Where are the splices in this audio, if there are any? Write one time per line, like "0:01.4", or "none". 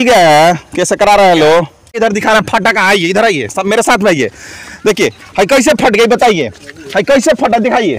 0:02.0